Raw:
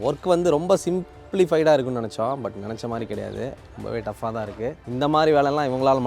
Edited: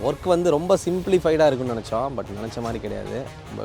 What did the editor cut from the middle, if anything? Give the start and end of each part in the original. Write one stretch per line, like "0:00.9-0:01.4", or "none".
0:01.0-0:01.3